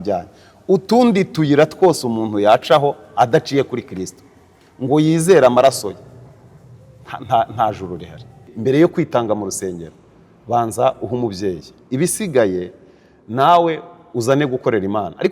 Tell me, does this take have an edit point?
yes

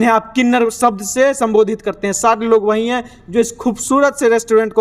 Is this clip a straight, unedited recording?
yes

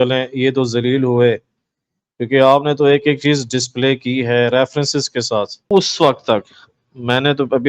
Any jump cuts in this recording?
yes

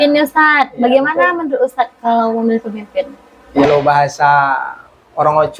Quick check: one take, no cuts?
no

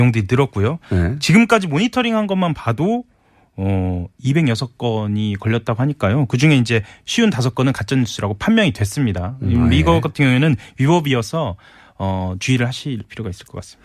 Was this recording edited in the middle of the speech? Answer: no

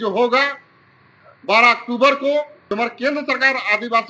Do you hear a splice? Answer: yes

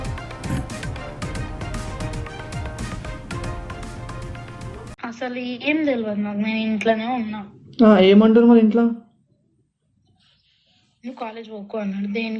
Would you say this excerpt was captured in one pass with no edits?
no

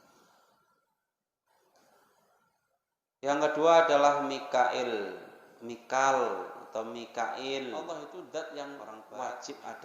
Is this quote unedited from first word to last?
no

